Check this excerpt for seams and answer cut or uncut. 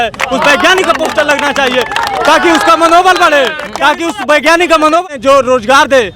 cut